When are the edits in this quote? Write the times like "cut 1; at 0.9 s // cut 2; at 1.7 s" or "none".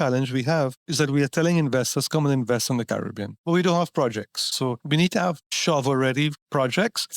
cut 1; at 4.5 s // cut 2; at 5.5 s